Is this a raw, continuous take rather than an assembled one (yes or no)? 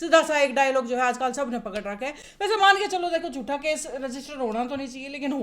yes